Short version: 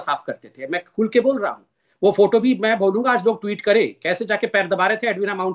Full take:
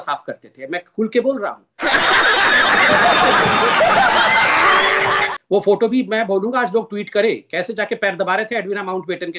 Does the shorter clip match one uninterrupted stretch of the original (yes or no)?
no